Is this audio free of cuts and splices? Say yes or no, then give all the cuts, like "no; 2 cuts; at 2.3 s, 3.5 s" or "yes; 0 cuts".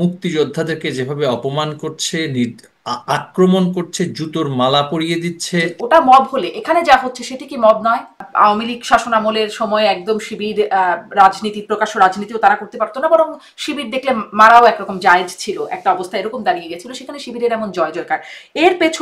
no; 2 cuts; at 5.7 s, 8.3 s